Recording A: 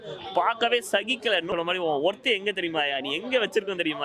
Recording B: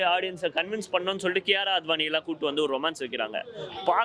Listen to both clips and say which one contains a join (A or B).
A